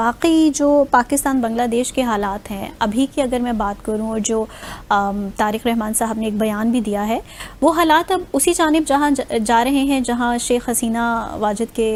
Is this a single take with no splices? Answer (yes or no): yes